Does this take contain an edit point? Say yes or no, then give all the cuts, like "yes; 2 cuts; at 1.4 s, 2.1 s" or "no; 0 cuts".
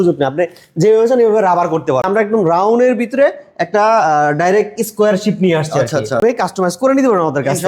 yes; 2 cuts; at 2.1 s, 6.2 s